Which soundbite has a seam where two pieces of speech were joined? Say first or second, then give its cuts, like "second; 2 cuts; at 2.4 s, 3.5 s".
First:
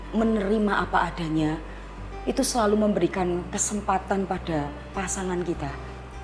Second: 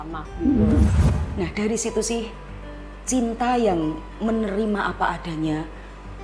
second; 1 cut; at 1.0 s